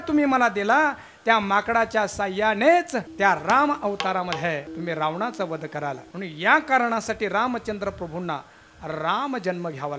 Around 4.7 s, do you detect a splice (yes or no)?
yes